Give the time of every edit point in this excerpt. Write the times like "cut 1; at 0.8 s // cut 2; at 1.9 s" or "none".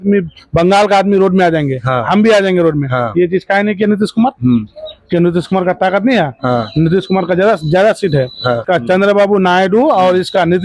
cut 1; at 8.6 s